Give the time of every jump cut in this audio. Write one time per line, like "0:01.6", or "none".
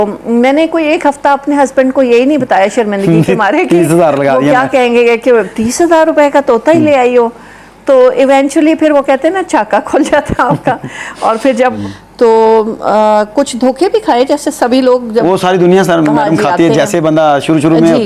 0:11.7